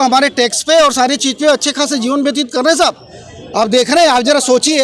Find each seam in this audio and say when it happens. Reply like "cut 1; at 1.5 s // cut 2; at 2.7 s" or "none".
none